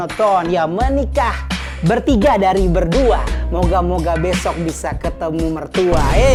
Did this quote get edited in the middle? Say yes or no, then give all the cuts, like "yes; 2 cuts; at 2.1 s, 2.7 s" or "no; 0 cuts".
no; 0 cuts